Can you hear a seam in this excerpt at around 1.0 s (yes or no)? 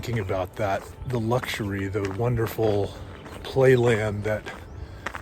yes